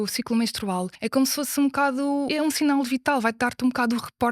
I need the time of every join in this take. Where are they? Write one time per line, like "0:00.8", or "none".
0:01.1
0:02.3